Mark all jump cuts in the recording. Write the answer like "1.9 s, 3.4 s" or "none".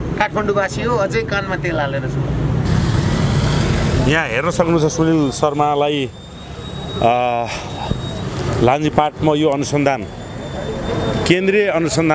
2.6 s